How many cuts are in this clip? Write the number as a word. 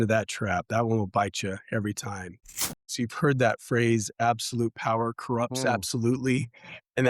one